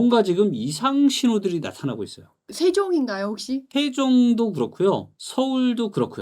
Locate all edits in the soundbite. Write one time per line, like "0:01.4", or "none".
0:02.5